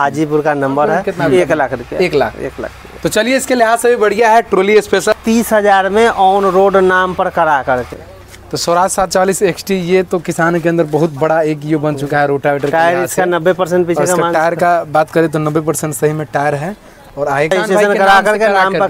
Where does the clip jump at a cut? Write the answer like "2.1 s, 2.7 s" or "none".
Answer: 1.1 s, 5.1 s, 8.0 s, 17.5 s